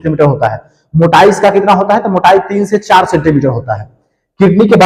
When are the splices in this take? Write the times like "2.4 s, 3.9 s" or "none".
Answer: none